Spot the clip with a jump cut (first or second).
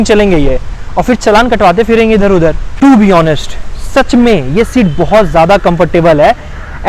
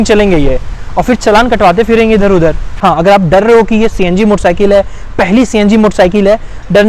second